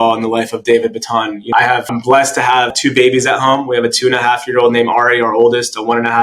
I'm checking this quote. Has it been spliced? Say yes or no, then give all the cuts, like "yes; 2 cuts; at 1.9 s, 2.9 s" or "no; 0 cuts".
no; 0 cuts